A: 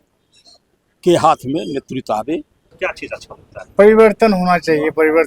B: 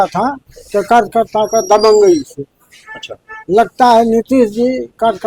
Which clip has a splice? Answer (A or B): A